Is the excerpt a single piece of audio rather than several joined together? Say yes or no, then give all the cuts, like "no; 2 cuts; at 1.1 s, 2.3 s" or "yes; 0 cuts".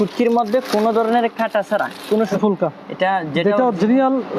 no; 1 cut; at 2.3 s